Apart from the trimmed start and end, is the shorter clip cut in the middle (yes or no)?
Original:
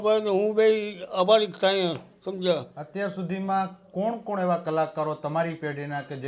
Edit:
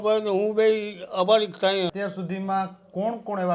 yes